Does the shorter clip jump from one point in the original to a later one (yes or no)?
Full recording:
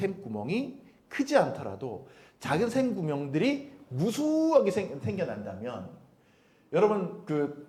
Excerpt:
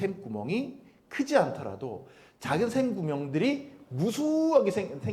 no